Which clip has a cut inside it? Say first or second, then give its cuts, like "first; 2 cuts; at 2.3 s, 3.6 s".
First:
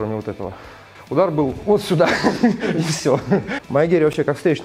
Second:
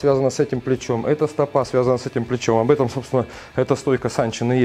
first; 2 cuts; at 0.9 s, 3.6 s